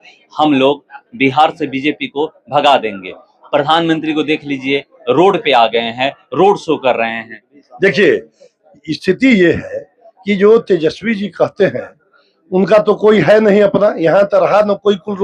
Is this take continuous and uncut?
yes; 0 cuts

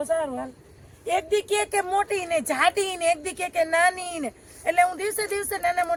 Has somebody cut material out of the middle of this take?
no; 0 cuts

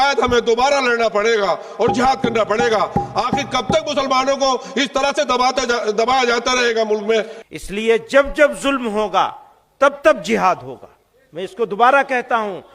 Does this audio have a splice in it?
yes; 1 cut; at 7.4 s

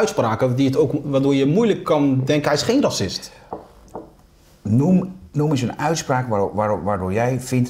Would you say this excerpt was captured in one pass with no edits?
yes; 0 cuts

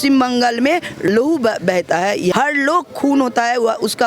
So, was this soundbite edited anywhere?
yes; 2 cuts; at 1.0 s, 2.3 s

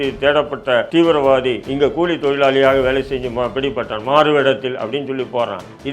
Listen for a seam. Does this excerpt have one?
yes; 2 cuts; at 0.9 s, 1.6 s

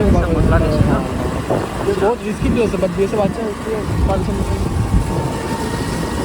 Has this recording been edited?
no; 0 cuts

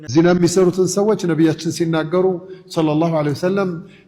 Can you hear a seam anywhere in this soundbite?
no; 0 cuts

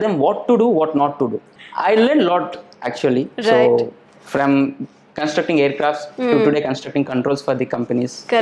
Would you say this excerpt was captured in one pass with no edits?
no; 1 cut; at 1.5 s

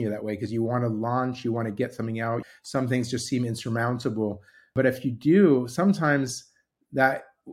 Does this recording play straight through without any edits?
no; 2 cuts; at 2.4 s, 4.7 s

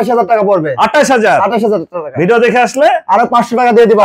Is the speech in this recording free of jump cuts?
yes; 0 cuts

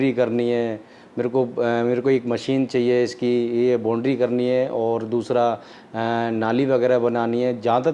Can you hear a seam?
no; 0 cuts

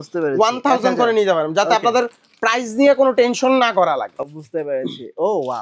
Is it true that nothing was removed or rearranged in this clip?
yes; 0 cuts

